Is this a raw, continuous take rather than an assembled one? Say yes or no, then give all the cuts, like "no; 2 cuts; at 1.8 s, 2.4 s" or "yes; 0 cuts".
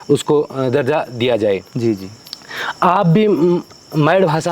yes; 0 cuts